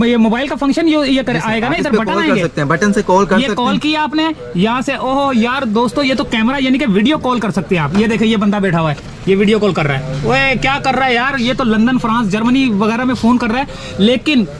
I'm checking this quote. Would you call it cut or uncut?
uncut